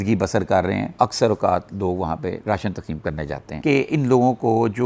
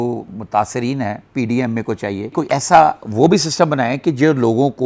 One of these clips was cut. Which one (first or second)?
first